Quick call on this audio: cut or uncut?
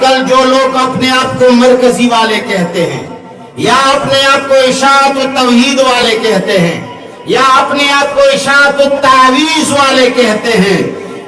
uncut